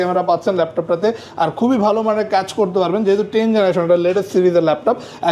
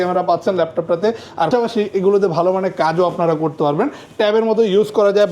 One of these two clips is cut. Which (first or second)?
second